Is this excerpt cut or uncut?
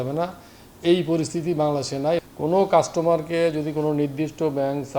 cut